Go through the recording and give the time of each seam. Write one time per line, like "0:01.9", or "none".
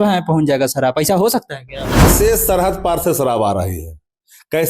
0:02.1